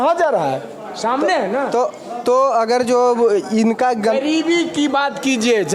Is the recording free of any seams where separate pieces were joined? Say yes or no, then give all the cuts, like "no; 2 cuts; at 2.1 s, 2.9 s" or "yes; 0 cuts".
yes; 0 cuts